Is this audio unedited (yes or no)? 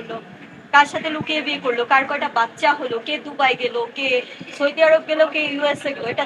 yes